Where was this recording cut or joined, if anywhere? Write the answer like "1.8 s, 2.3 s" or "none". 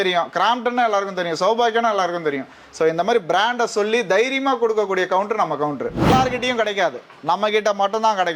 6.1 s